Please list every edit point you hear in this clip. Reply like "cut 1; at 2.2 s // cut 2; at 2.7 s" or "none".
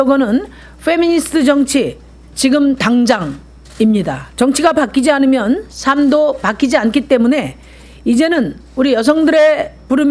cut 1; at 4.2 s